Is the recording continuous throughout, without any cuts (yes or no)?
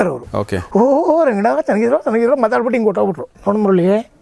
no